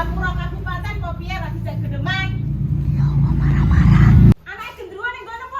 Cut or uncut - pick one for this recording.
cut